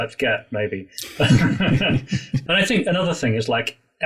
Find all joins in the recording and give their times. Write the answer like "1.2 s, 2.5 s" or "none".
2.3 s